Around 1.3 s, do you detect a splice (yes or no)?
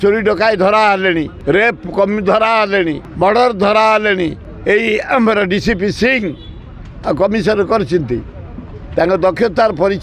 yes